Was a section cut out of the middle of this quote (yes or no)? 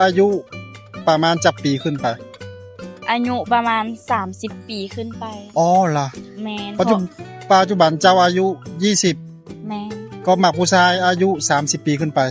no